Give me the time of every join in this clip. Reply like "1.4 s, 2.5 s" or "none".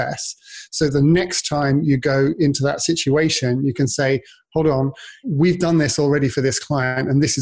5.2 s